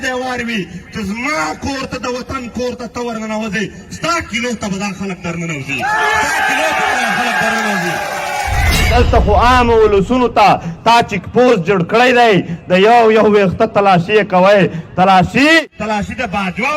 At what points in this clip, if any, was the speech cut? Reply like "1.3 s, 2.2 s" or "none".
8.8 s